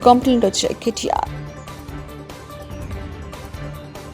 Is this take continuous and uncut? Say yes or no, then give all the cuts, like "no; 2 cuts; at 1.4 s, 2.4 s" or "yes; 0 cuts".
no; 2 cuts; at 1.3 s, 3.2 s